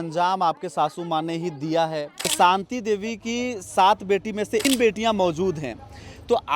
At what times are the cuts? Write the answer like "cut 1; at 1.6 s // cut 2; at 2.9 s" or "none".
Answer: cut 1; at 2.3 s // cut 2; at 4.6 s